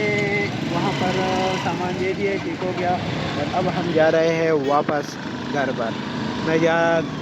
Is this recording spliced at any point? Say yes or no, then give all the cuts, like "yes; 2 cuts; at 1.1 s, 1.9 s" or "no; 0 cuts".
no; 0 cuts